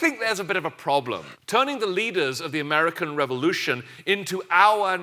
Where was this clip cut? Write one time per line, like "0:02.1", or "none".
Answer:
0:01.3